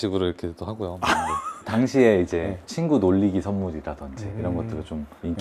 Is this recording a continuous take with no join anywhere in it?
no; 1 cut; at 1.5 s

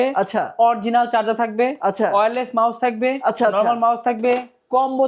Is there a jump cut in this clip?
no; 0 cuts

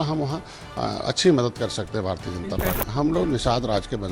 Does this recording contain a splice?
yes; 1 cut; at 2.8 s

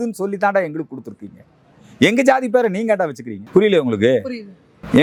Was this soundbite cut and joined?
no; 0 cuts

